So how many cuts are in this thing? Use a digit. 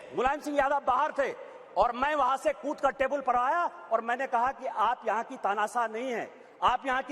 0